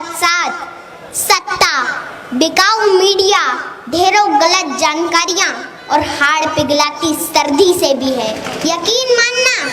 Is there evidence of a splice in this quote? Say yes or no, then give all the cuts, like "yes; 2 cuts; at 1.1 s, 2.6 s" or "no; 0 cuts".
yes; 1 cut; at 8.5 s